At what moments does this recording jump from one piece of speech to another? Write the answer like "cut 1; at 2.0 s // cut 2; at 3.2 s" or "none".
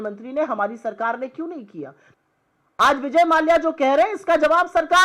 cut 1; at 2.0 s